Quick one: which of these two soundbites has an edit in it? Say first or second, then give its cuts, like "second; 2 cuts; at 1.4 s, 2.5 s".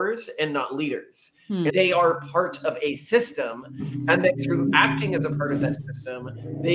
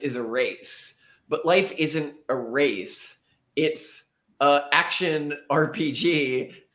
first; 1 cut; at 1.7 s